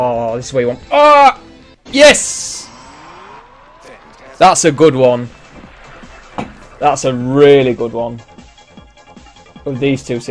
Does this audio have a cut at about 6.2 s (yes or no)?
no